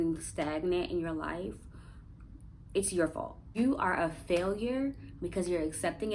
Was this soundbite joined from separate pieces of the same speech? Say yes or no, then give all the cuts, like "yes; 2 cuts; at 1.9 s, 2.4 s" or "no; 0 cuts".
yes; 1 cut; at 3.4 s